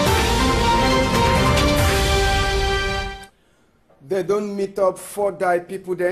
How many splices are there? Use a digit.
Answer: 1